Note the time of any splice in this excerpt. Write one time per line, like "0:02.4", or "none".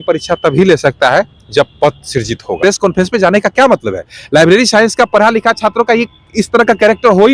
0:02.6